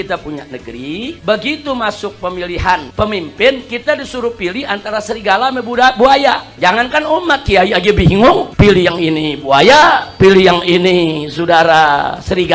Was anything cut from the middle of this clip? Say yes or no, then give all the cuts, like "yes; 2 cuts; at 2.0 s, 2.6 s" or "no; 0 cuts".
yes; 2 cuts; at 1.2 s, 6.5 s